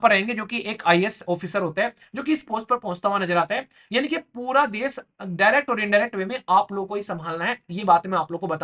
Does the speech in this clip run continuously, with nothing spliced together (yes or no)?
yes